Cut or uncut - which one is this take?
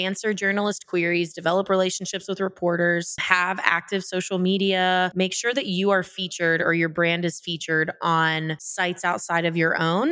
cut